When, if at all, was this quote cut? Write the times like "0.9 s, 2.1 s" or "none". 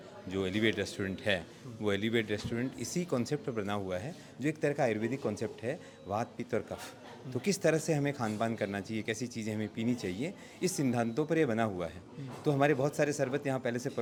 none